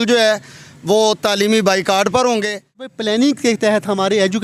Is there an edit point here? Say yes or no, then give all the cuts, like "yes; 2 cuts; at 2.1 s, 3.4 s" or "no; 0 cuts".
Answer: yes; 1 cut; at 3.0 s